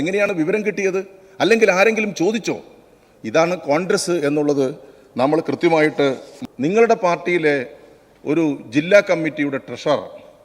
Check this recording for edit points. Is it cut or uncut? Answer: cut